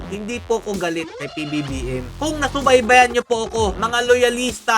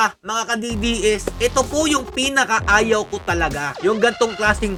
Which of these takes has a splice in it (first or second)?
first